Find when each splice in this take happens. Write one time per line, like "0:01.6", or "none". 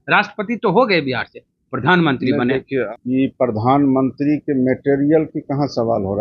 0:02.9